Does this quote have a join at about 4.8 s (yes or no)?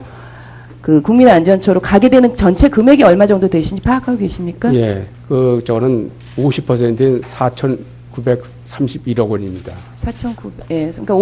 no